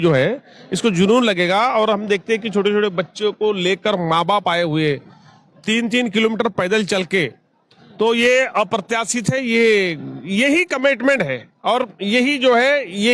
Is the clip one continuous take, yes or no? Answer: yes